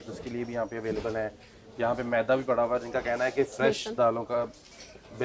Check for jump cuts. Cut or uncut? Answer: uncut